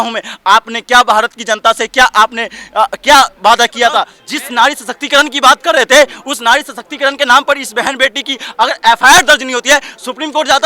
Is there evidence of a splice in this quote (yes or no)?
yes